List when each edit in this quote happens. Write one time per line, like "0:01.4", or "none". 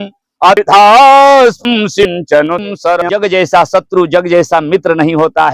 0:03.1